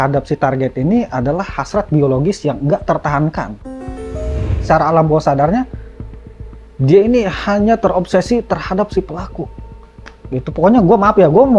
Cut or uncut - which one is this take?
cut